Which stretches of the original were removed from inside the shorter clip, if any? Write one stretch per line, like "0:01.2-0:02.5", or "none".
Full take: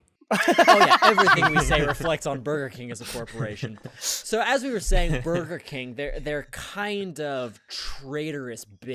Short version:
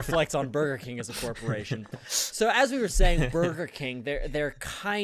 none